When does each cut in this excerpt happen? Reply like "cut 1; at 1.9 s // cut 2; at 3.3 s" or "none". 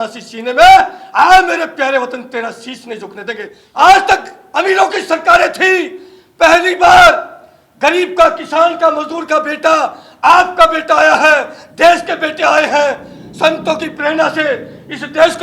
cut 1; at 3.5 s